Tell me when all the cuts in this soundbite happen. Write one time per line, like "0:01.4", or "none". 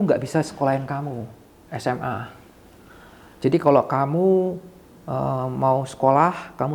none

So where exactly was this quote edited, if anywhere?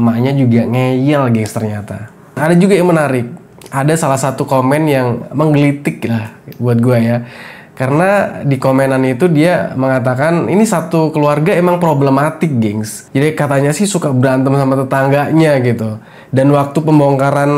0:02.3

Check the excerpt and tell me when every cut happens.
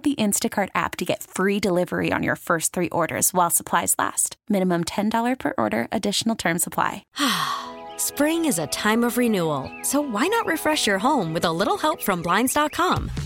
0:07.0

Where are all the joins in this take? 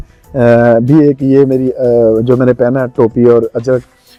none

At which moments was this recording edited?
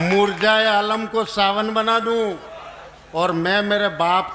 none

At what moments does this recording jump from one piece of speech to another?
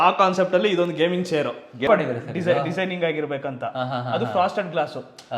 0:01.9

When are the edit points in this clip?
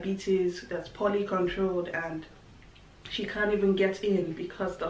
none

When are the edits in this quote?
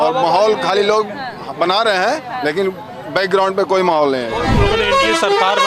0:04.5

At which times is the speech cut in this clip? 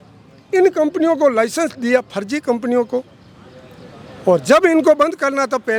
none

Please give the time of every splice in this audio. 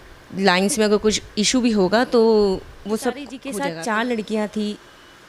0:03.4

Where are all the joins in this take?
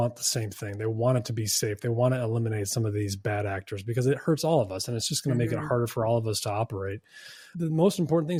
none

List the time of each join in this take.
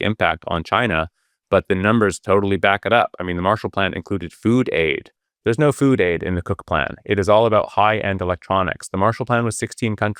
none

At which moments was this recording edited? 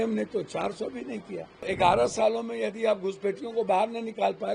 0:01.6

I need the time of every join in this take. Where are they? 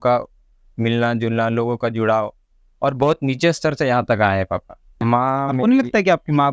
0:04.9

